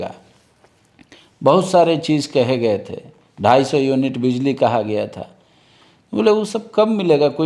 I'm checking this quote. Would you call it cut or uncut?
uncut